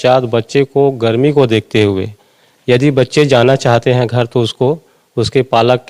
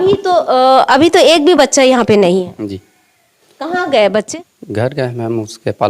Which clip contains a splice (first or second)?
second